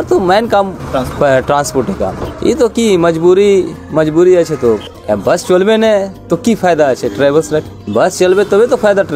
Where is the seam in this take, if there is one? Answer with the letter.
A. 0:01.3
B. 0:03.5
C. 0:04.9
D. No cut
C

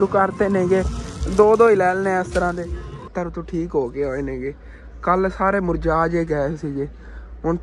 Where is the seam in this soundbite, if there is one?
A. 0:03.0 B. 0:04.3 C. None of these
A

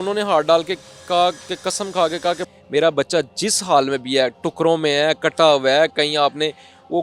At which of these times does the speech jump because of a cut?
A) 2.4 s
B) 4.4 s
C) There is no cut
A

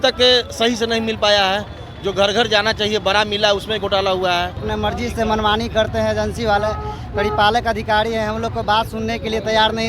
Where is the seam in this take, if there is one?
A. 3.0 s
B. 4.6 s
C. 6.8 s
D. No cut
B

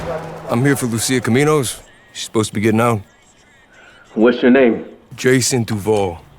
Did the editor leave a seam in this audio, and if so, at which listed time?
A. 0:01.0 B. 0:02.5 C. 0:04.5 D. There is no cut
B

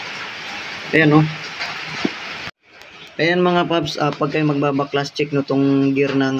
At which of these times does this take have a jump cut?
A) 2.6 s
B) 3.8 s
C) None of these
A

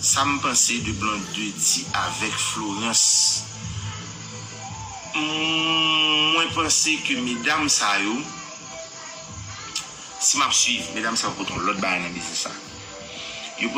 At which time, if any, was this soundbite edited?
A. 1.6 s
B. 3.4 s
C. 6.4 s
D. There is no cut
D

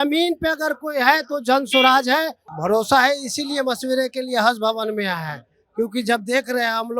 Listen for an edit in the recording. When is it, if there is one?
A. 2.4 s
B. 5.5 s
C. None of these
A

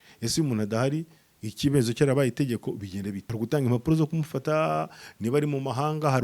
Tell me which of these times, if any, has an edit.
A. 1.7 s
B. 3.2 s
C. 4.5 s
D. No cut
B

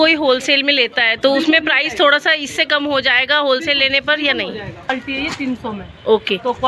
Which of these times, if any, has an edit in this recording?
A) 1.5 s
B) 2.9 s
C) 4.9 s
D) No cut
C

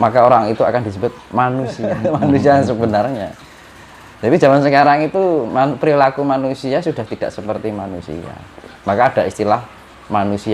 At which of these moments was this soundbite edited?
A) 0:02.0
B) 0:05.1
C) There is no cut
A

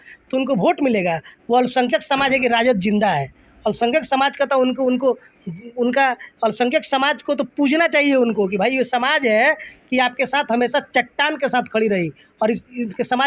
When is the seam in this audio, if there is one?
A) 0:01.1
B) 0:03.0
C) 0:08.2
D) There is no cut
D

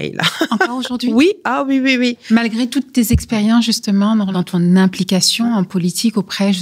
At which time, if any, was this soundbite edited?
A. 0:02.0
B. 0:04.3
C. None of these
B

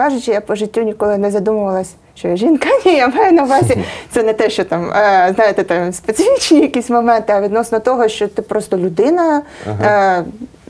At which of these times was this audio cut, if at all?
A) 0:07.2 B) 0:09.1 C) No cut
C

